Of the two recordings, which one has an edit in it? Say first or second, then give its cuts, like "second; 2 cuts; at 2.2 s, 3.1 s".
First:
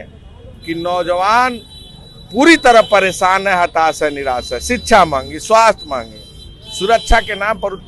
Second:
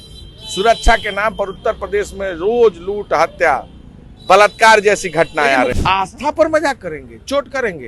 second; 1 cut; at 5.7 s